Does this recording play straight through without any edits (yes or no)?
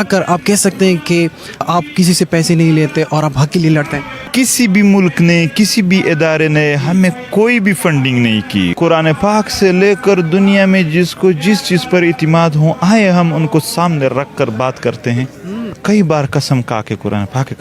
no